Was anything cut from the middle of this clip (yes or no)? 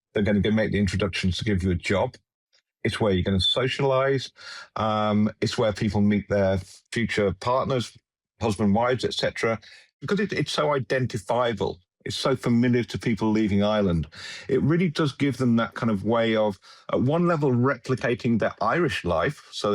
yes